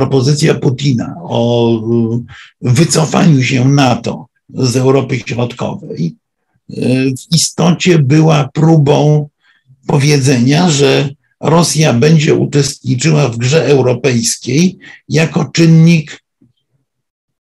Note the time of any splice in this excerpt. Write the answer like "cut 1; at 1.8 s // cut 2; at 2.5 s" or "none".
none